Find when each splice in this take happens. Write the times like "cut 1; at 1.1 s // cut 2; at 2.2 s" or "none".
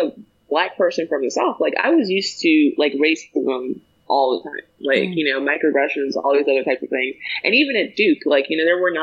none